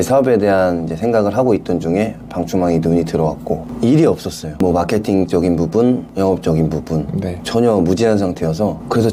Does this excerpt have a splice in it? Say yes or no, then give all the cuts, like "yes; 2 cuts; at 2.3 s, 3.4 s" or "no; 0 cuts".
yes; 2 cuts; at 3.7 s, 4.5 s